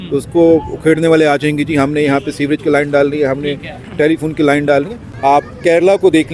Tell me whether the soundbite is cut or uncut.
cut